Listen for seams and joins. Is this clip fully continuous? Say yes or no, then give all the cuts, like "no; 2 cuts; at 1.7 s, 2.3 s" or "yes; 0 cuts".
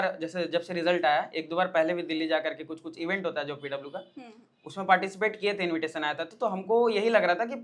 yes; 0 cuts